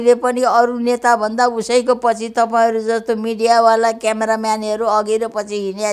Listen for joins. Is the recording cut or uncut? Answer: uncut